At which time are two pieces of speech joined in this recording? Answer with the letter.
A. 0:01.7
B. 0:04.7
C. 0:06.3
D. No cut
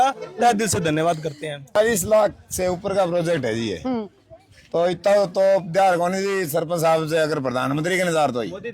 A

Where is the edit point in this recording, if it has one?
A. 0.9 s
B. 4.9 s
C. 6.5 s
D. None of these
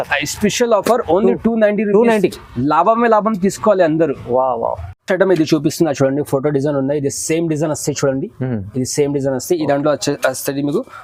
D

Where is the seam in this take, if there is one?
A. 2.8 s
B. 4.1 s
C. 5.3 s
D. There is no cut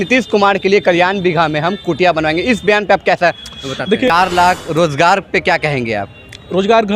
B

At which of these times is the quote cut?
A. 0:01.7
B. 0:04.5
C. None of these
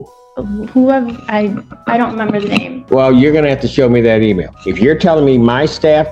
B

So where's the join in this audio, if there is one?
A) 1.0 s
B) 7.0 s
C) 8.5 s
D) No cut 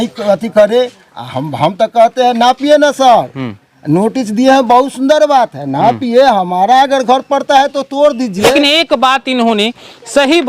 C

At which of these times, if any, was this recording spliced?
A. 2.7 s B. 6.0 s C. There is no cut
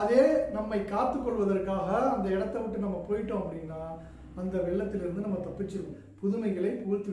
B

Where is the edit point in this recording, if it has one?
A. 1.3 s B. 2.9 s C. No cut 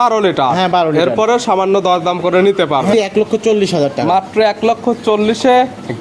B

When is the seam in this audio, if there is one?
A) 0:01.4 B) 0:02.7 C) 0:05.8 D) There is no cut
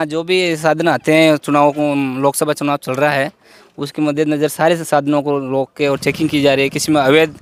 D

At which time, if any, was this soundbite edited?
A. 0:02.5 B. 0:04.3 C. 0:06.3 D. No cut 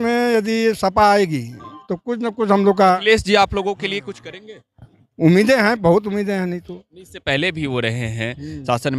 D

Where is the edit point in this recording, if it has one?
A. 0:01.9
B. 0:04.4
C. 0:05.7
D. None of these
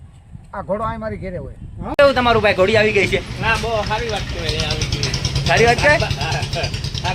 A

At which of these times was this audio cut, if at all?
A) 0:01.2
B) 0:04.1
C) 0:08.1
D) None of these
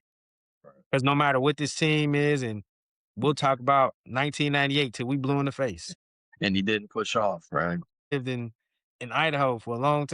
C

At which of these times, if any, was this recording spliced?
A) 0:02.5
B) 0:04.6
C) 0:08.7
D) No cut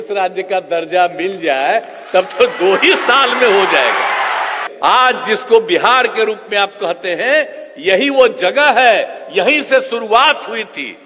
B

